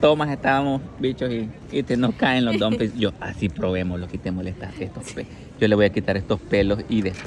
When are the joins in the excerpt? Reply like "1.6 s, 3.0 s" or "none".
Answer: none